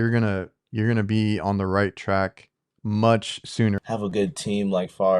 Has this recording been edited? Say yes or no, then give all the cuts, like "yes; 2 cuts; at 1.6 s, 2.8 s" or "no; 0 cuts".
yes; 1 cut; at 3.8 s